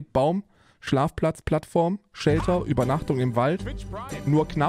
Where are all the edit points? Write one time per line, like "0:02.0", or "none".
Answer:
none